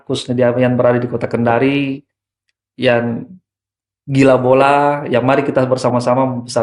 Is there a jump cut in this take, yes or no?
no